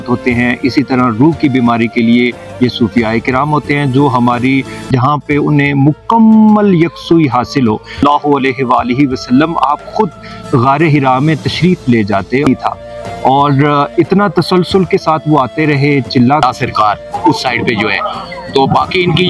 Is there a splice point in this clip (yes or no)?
yes